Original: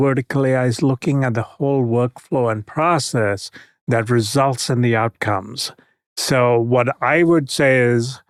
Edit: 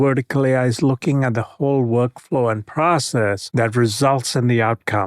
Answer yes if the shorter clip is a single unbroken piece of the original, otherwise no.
no